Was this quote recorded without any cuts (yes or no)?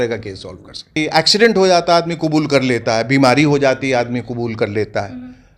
no